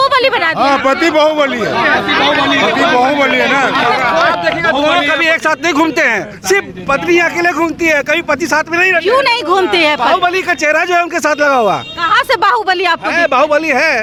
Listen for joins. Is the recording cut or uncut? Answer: uncut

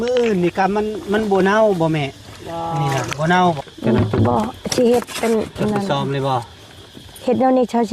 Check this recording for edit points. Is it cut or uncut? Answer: cut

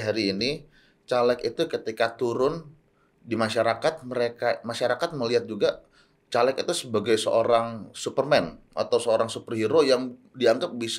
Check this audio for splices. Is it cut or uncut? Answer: uncut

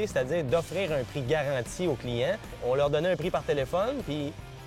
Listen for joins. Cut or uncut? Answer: cut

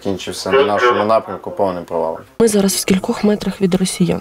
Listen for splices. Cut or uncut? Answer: cut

